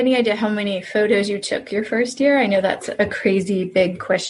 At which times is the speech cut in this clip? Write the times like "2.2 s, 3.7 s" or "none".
none